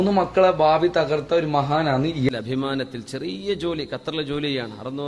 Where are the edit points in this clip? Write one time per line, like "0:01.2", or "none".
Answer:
0:02.3